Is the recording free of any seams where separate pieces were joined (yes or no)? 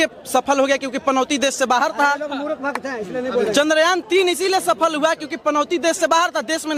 yes